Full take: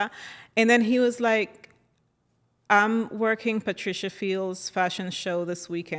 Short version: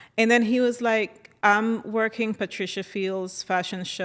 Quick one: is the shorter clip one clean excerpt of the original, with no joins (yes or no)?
no